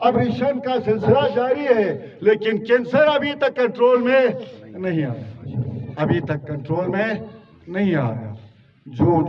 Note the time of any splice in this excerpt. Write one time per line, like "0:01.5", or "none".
none